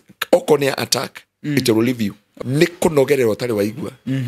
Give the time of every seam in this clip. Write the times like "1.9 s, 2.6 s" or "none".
2.2 s